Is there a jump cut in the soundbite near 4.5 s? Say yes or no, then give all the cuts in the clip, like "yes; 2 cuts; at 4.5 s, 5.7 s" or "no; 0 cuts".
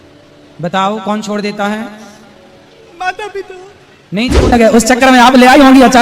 yes; 1 cut; at 4.5 s